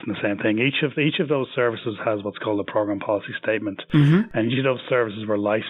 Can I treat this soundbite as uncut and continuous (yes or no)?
yes